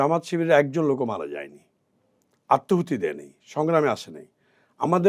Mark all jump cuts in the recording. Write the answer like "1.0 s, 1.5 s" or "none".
none